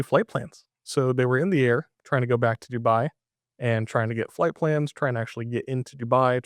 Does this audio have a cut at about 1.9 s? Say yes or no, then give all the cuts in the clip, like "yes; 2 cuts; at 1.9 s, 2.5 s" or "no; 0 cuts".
yes; 1 cut; at 1.9 s